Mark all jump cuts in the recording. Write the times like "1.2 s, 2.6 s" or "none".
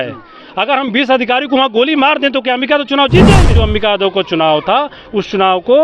3.6 s